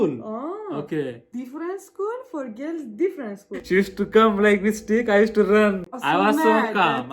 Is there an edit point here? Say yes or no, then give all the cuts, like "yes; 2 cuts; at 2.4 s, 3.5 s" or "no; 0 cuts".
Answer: yes; 2 cuts; at 3.6 s, 5.9 s